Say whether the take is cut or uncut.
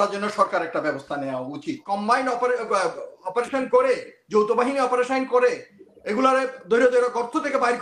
cut